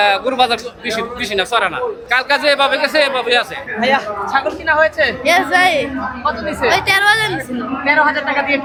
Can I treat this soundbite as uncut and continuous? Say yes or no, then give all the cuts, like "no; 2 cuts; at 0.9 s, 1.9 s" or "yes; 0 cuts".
yes; 0 cuts